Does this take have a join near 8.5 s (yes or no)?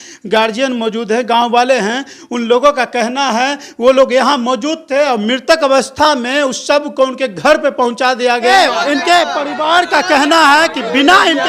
yes